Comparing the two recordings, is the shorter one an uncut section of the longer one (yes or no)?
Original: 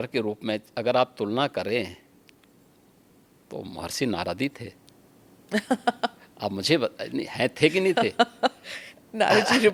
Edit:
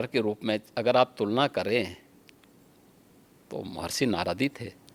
yes